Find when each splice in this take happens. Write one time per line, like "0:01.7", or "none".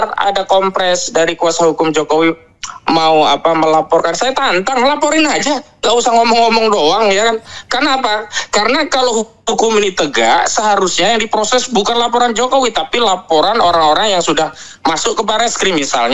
none

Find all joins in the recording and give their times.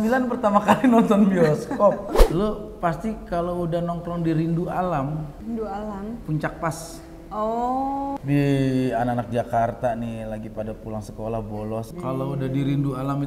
0:02.2
0:05.3
0:08.2
0:11.9

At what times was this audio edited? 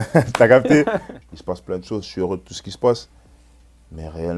0:01.1

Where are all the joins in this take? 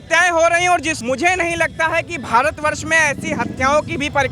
0:00.9

